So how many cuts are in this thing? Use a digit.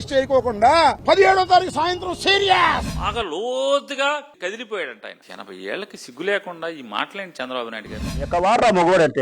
3